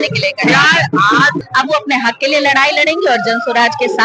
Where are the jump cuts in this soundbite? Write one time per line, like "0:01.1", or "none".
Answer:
0:01.4